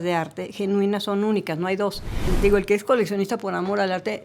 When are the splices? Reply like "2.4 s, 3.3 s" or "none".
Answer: 2.3 s